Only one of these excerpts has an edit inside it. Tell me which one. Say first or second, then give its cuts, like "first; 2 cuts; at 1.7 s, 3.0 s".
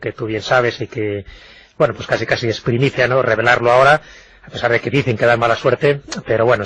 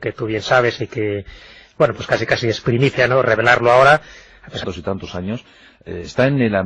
first; 1 cut; at 4.6 s